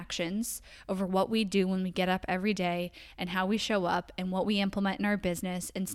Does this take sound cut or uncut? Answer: uncut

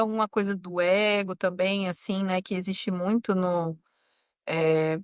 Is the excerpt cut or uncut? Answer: uncut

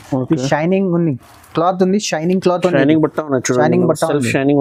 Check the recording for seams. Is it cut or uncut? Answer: uncut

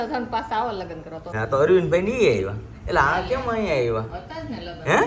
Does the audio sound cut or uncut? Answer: cut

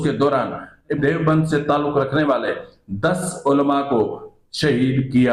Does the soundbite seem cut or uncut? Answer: cut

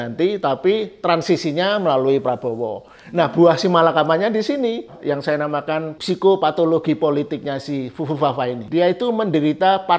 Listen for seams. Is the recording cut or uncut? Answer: cut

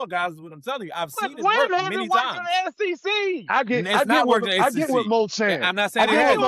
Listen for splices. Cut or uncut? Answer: uncut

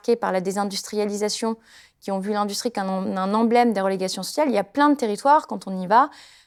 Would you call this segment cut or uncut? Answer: uncut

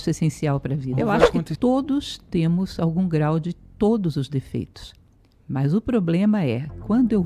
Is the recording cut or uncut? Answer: cut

